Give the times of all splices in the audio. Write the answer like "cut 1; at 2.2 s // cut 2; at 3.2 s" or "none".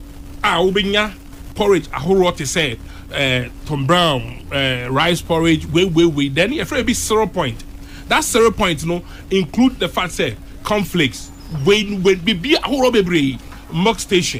none